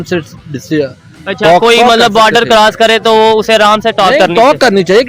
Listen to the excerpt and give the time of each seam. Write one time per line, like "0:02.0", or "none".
none

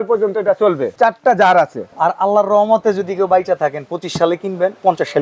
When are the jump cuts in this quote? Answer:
0:00.9
0:01.8

